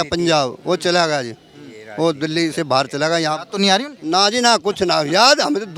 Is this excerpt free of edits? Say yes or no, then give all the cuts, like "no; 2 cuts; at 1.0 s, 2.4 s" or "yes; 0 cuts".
yes; 0 cuts